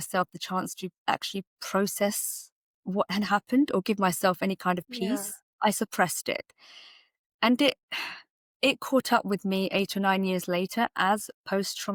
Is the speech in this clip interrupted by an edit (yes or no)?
no